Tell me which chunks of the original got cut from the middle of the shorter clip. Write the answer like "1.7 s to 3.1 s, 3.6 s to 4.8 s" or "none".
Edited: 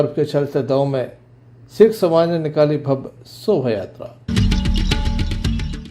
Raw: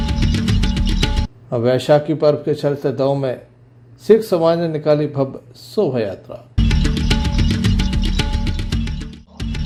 6.6 s to 7.5 s